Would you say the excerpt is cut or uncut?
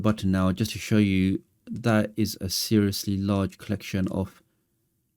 uncut